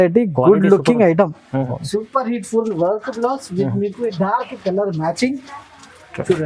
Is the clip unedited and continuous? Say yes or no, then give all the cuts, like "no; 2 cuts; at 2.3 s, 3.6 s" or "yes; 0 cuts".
no; 1 cut; at 1.8 s